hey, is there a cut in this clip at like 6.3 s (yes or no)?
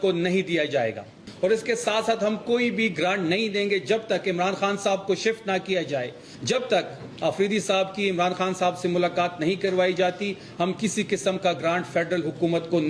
yes